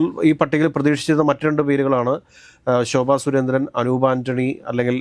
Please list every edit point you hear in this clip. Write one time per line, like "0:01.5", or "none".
none